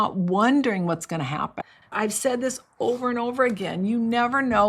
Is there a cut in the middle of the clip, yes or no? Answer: yes